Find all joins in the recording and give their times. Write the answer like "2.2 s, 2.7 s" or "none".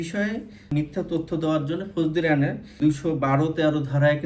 2.7 s